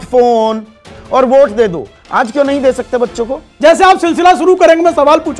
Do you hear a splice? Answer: yes; 2 cuts; at 0.9 s, 3.5 s

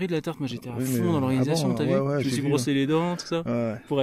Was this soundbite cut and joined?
no; 0 cuts

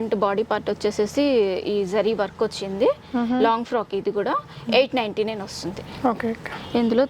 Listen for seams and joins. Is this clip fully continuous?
yes; 0 cuts

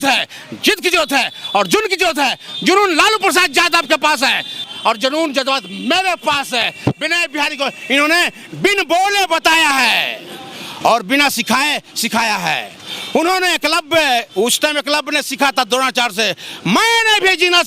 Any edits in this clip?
yes; 1 cut; at 4.6 s

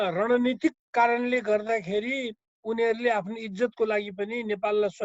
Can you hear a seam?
no; 0 cuts

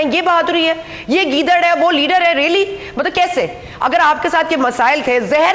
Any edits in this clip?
no; 0 cuts

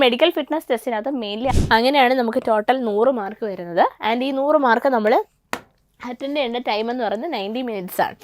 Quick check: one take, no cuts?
no; 1 cut; at 1.5 s

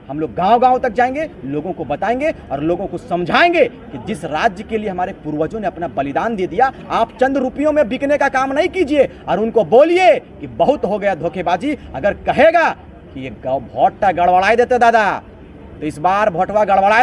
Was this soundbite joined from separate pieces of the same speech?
no; 0 cuts

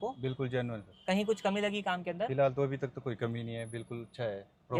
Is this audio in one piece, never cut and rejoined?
yes; 0 cuts

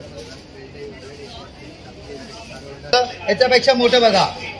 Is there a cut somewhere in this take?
yes; 1 cut; at 2.9 s

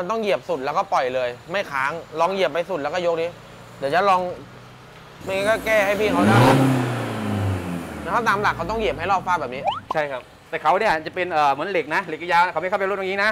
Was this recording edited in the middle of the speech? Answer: no; 0 cuts

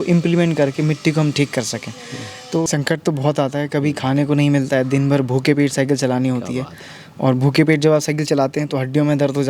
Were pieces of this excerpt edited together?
yes; 1 cut; at 2.6 s

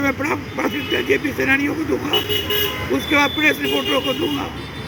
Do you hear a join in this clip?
no; 0 cuts

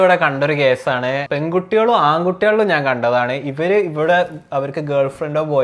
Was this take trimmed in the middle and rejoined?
yes; 1 cut; at 1.2 s

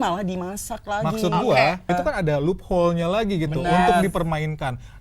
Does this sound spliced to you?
yes; 1 cut; at 1.9 s

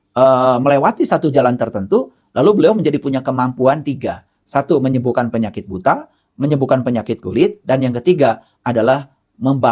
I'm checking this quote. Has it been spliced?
no; 0 cuts

